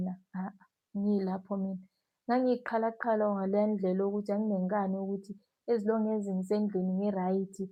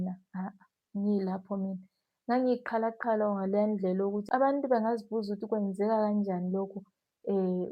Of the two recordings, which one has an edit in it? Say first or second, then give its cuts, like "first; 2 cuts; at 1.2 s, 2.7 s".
second; 1 cut; at 4.2 s